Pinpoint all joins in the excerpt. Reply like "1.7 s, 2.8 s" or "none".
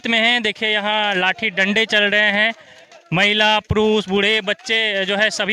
none

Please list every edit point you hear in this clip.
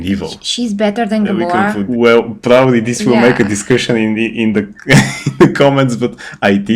1.8 s

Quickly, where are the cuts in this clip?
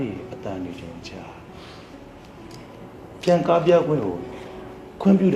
2.5 s

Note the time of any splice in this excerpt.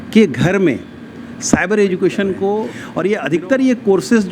2.8 s

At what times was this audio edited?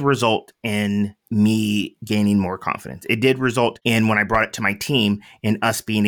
1.2 s, 2.0 s, 3.8 s

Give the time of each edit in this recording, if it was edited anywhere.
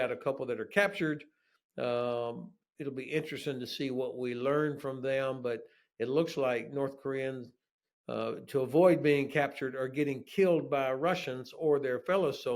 none

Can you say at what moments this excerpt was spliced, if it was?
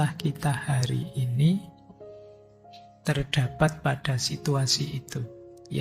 1.7 s, 3.0 s

